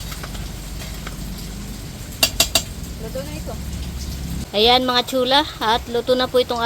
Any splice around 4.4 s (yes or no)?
yes